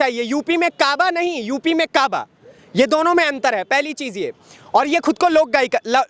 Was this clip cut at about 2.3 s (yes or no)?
no